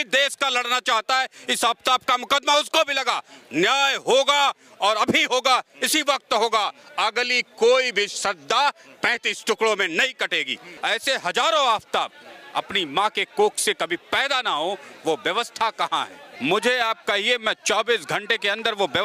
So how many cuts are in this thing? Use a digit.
2